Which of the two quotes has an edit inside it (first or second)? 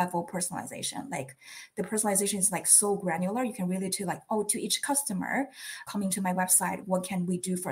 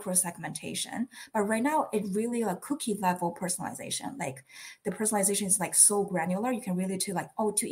first